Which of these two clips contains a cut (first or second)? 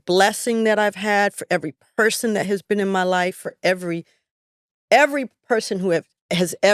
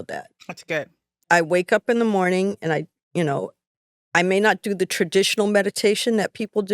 second